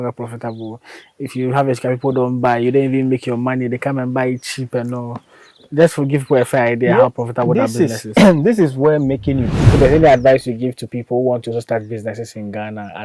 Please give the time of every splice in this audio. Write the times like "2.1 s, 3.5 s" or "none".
9.4 s